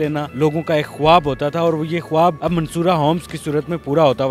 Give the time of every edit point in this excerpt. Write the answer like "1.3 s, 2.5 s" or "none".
none